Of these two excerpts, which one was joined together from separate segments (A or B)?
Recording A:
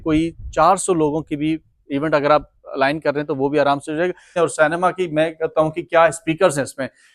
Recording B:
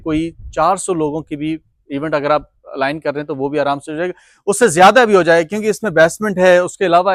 A